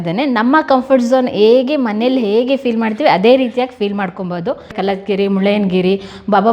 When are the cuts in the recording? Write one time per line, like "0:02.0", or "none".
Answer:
0:04.7